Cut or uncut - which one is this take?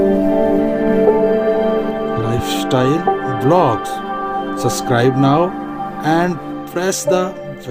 uncut